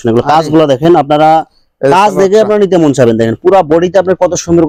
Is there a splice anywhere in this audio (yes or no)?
no